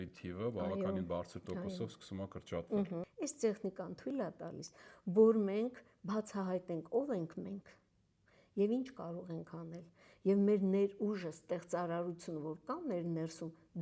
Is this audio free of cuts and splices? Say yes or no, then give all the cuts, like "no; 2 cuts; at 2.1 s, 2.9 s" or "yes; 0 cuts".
no; 1 cut; at 3.0 s